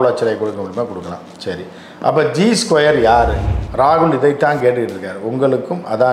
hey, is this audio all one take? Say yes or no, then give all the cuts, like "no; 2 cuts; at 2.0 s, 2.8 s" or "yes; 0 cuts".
no; 1 cut; at 3.5 s